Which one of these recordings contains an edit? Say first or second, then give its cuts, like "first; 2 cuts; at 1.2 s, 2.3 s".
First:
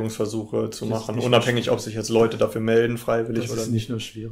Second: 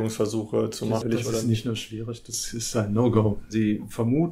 second; 2 cuts; at 1.0 s, 3.5 s